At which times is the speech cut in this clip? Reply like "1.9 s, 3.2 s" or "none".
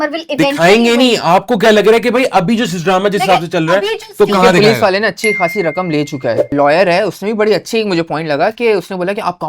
6.5 s